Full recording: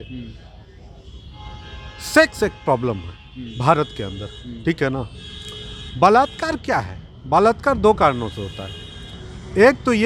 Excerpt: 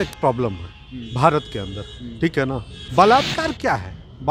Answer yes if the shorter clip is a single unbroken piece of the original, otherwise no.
no